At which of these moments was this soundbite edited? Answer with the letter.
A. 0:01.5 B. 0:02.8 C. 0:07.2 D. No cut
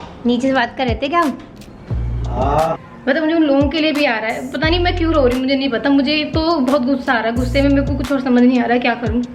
B